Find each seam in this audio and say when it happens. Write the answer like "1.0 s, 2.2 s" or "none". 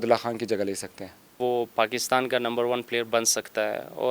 1.4 s